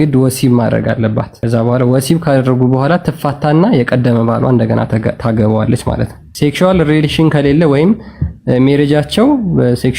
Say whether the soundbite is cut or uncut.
cut